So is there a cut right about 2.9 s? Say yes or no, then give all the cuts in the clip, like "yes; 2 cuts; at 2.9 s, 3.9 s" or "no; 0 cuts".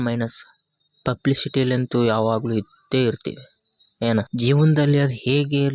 no; 1 cut; at 4.3 s